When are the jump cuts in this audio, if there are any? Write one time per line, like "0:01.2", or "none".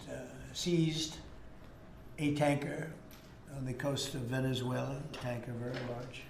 0:05.1